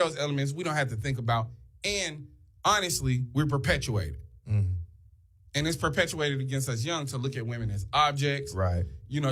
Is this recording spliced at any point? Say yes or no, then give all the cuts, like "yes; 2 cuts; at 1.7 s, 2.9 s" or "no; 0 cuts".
yes; 1 cut; at 5.2 s